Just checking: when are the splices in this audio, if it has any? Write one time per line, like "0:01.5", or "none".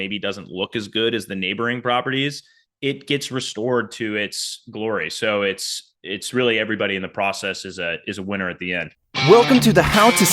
0:09.0